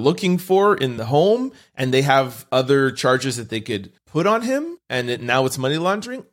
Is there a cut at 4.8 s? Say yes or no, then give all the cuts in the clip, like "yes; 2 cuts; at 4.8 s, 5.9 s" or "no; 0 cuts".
yes; 3 cuts; at 0.9 s, 4.0 s, 4.8 s